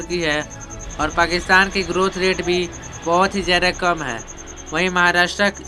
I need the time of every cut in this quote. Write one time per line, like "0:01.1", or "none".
none